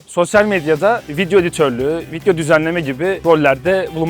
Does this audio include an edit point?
yes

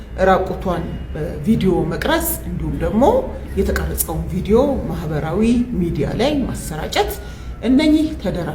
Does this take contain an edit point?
no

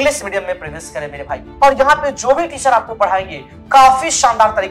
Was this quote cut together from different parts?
yes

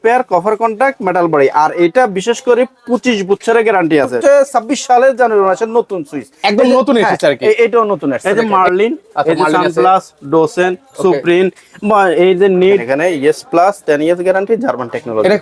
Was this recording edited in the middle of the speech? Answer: yes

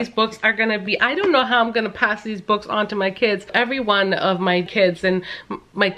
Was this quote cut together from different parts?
yes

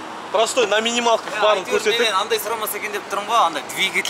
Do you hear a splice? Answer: no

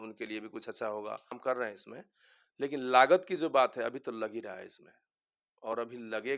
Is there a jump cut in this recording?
yes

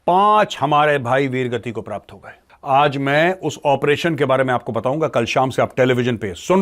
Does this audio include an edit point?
yes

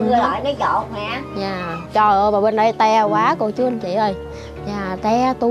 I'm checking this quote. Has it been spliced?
yes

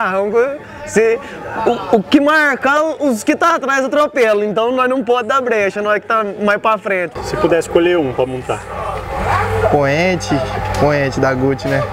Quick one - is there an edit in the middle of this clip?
yes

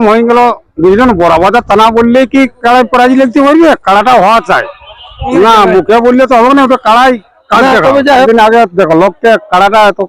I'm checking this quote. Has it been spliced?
yes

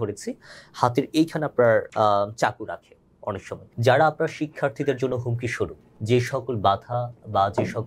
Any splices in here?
yes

